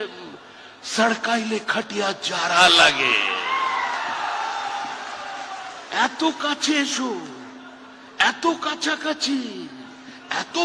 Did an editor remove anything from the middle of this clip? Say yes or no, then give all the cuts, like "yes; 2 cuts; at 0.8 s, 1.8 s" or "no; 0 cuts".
no; 0 cuts